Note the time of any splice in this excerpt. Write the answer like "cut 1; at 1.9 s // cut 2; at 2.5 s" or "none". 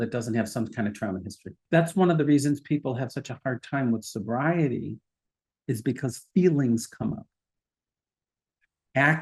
cut 1; at 1.6 s